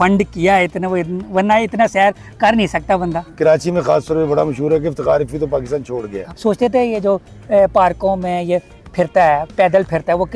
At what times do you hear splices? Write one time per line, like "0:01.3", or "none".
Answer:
0:03.3
0:06.1